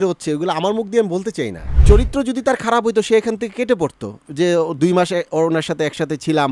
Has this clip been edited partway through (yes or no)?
yes